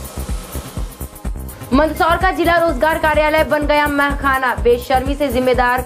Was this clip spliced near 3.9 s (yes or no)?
no